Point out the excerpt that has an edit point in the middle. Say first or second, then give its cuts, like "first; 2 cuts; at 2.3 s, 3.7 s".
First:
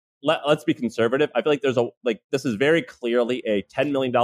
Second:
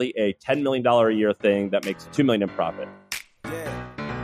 second; 1 cut; at 2.8 s